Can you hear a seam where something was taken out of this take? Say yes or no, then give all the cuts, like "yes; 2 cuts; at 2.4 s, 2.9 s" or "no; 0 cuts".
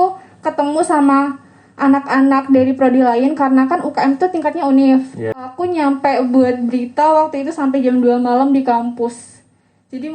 yes; 1 cut; at 5.5 s